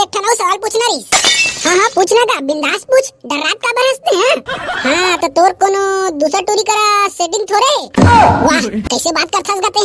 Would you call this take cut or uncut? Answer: uncut